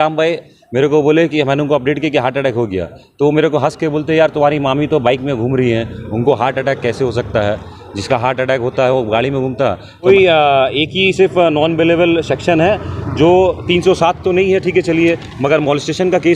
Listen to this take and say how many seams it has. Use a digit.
1